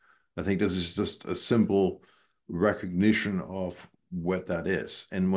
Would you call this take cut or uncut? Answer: uncut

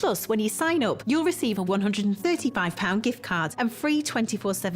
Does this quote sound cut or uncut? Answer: cut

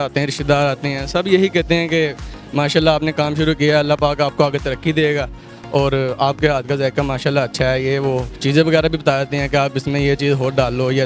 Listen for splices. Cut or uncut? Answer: uncut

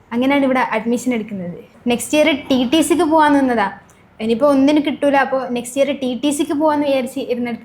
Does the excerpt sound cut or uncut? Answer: cut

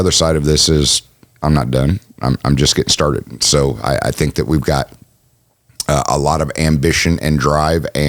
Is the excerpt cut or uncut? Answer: uncut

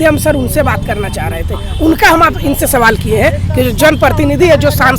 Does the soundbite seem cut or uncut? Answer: uncut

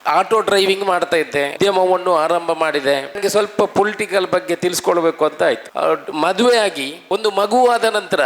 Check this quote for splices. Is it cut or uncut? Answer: cut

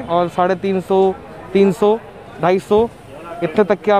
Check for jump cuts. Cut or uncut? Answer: uncut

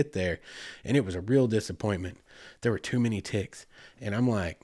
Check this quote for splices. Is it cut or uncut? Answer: uncut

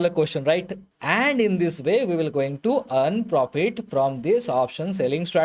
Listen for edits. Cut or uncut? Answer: cut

